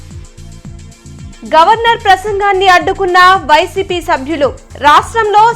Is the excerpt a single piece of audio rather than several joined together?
no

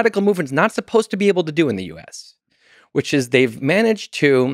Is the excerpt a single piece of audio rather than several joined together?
no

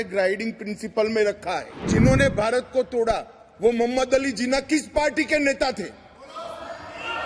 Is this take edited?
yes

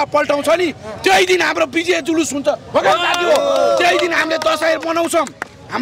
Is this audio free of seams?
yes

